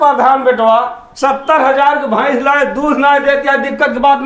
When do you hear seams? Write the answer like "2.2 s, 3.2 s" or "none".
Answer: none